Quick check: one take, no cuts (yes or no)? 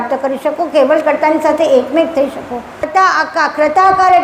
no